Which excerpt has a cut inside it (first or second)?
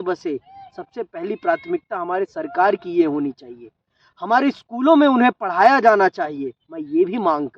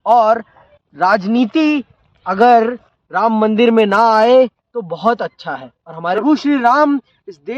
second